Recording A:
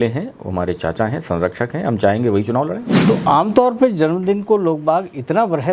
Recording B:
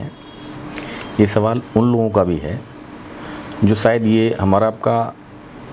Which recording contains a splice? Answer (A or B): A